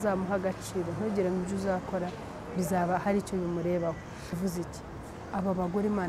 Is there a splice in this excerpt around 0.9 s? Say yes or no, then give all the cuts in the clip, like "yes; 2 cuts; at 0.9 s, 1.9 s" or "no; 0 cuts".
no; 1 cut; at 4.4 s